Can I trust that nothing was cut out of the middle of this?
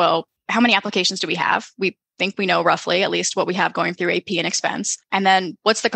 no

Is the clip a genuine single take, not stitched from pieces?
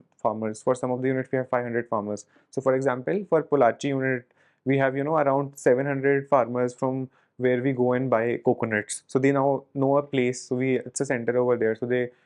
yes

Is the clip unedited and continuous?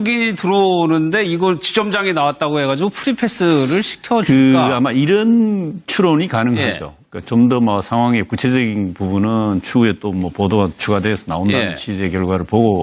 yes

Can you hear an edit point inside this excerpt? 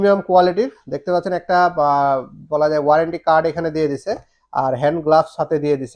no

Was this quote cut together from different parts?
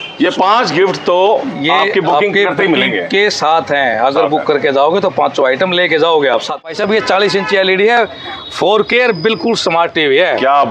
yes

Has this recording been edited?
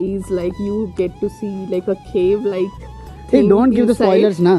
no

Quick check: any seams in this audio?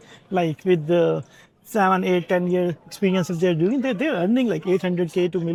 no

